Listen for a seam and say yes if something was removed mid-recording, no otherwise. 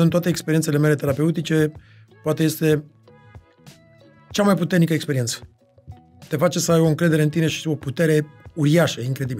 no